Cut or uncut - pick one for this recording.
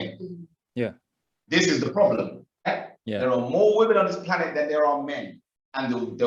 cut